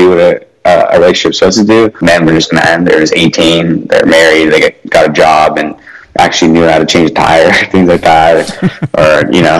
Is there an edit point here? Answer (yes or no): yes